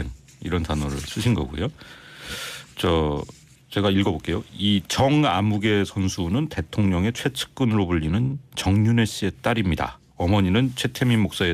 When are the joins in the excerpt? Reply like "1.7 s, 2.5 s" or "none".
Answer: 6.9 s

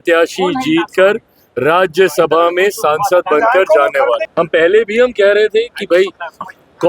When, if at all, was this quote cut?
4.2 s

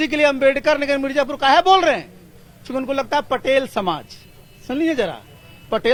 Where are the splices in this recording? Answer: none

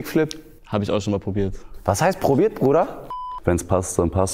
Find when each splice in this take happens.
3.1 s

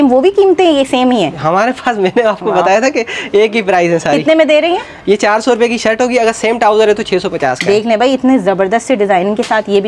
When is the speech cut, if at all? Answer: none

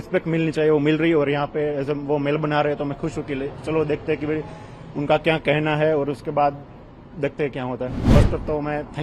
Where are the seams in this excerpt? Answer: 8.1 s

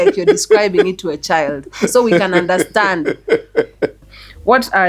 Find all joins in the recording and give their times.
4.0 s

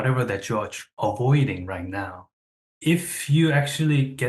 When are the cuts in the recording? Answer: 2.6 s

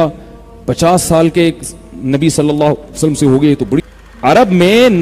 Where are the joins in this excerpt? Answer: 3.8 s

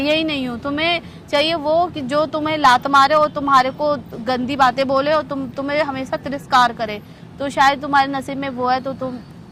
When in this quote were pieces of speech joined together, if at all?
none

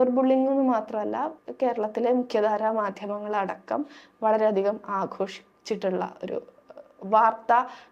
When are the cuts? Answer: 1.4 s

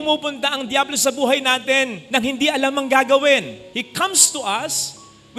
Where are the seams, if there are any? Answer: none

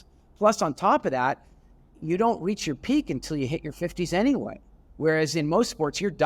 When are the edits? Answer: none

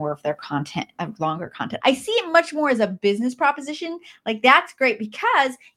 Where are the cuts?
1.7 s

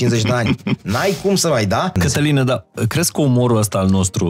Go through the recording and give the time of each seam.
1.9 s

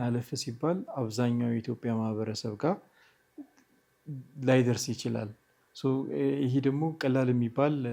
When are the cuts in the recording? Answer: none

